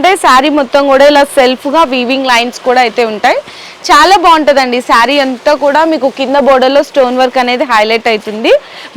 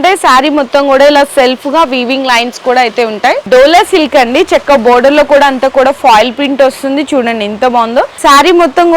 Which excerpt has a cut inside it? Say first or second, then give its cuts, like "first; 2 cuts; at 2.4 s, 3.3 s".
second; 2 cuts; at 3.4 s, 8.2 s